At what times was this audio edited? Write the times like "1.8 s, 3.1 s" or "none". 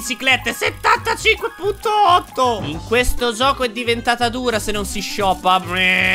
2.7 s